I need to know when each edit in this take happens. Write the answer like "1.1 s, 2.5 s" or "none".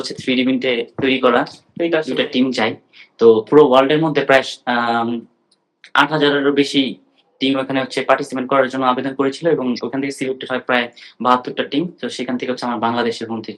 2.1 s